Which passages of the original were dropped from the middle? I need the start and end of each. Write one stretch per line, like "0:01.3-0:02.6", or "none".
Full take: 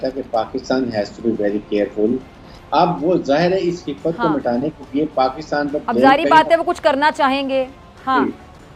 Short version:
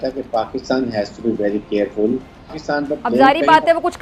0:02.6-0:05.4